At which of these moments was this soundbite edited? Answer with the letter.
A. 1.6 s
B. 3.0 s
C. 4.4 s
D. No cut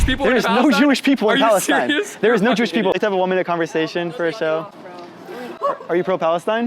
B